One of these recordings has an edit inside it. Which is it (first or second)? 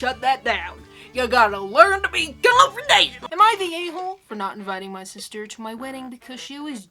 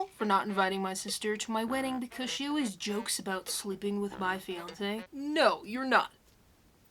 first